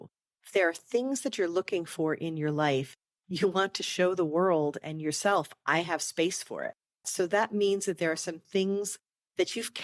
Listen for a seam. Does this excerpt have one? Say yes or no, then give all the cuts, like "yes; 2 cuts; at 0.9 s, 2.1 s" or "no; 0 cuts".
yes; 1 cut; at 7.1 s